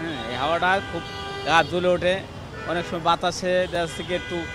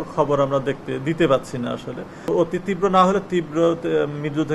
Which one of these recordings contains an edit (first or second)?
second